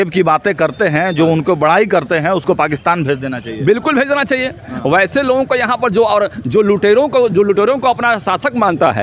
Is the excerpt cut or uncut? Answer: uncut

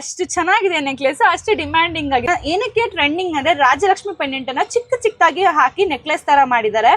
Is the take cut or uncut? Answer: cut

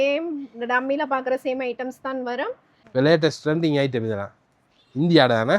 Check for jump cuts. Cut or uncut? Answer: cut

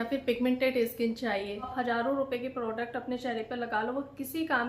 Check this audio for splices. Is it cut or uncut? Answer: cut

